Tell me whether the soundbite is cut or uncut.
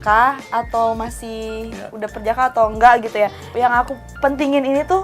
cut